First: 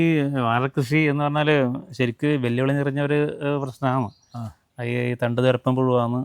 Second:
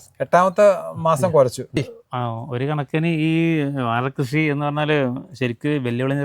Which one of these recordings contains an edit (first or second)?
second